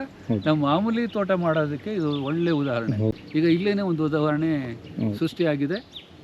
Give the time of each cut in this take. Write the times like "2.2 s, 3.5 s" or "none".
3.1 s